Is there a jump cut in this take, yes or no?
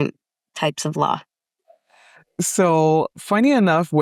no